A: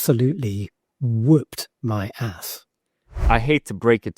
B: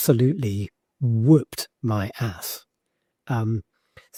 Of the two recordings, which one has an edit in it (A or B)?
A